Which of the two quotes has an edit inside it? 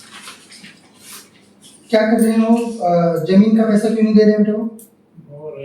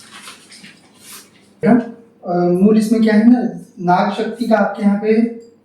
second; 1 cut; at 1.6 s

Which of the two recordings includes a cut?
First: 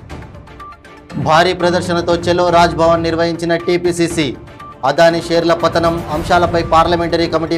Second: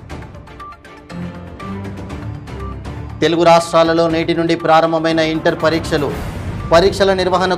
second; 1 cut; at 1.1 s

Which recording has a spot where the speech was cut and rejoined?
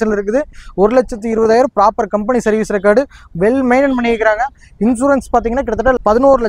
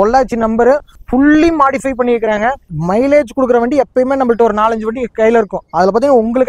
second; 2 cuts; at 0.9 s, 2.7 s

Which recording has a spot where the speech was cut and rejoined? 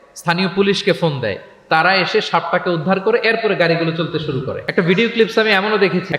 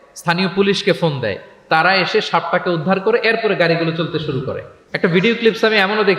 first; 1 cut; at 4.6 s

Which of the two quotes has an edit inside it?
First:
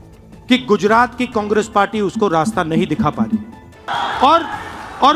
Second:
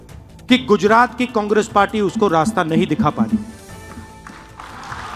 first; 1 cut; at 3.9 s

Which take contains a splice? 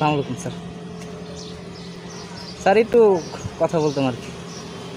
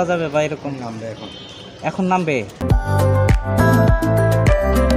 second; 2 cuts; at 2.6 s, 3.8 s

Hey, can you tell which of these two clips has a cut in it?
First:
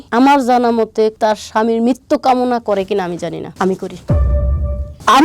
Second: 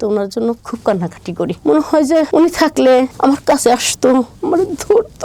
first; 1 cut; at 1.2 s

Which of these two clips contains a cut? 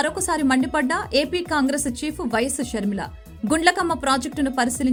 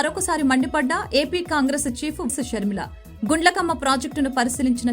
second; 1 cut; at 2.3 s

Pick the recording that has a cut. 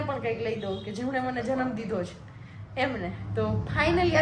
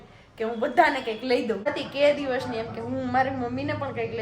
second; 1 cut; at 1.7 s

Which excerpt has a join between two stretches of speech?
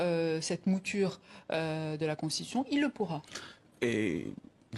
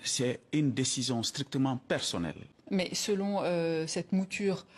second; 1 cut; at 2.5 s

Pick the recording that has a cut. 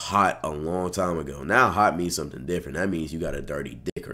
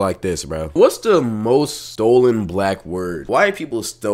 second; 3 cuts; at 0.7 s, 1.8 s, 3.2 s

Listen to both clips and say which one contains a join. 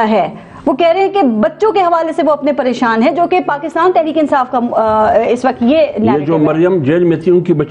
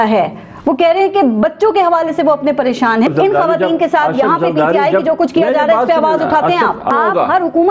second; 2 cuts; at 3.1 s, 6.9 s

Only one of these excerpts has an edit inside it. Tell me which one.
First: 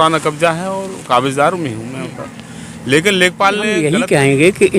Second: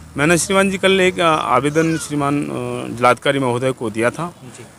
first; 1 cut; at 3.7 s

